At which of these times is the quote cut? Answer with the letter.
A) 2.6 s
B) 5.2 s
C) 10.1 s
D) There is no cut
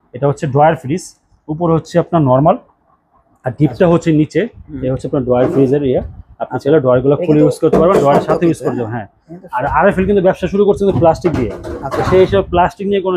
D